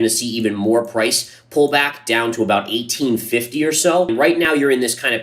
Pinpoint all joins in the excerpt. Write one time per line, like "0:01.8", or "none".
0:04.3